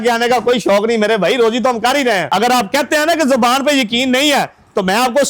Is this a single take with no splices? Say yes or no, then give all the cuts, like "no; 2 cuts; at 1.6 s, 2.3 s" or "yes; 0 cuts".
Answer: no; 1 cut; at 2.2 s